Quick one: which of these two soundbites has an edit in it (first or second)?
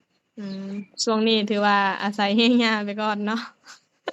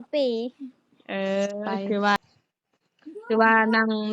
second